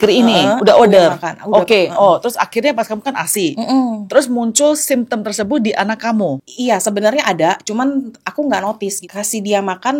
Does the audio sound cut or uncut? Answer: cut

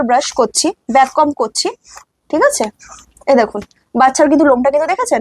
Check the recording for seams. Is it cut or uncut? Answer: uncut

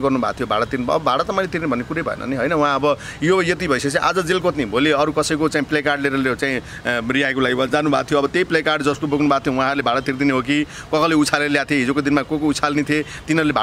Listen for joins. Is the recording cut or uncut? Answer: uncut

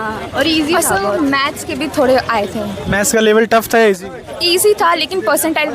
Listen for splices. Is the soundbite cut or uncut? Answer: uncut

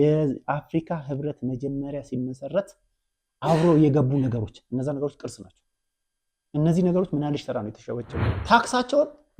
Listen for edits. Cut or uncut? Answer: cut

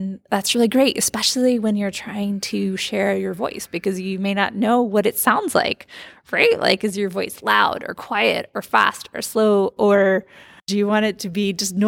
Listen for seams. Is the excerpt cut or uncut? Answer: cut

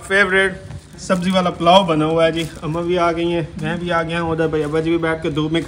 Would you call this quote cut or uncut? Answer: uncut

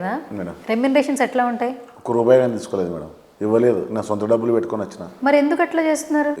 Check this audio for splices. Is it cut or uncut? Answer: uncut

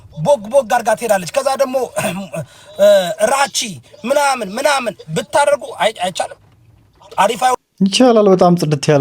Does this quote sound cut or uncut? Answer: uncut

